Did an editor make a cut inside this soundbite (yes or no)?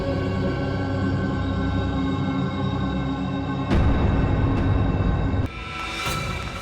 yes